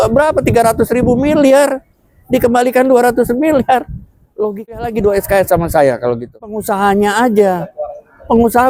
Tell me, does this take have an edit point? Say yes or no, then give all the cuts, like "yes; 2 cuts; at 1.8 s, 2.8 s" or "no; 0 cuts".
no; 0 cuts